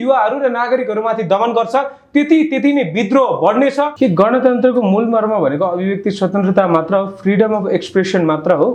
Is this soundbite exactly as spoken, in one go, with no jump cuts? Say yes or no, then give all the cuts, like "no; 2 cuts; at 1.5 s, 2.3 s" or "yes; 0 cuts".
no; 1 cut; at 3.9 s